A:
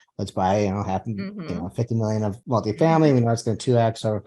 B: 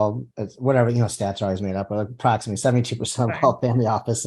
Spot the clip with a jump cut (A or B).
A